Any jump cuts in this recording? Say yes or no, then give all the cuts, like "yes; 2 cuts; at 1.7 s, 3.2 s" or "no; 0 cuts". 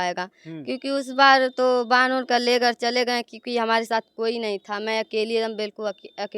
no; 0 cuts